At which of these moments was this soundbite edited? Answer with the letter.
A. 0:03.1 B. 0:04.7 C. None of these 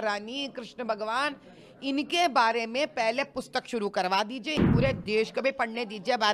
B